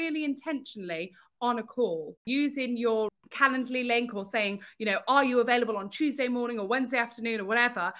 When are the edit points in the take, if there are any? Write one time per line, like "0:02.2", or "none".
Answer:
0:02.2
0:03.1